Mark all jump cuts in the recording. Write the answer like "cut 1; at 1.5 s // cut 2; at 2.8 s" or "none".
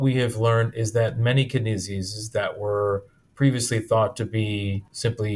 none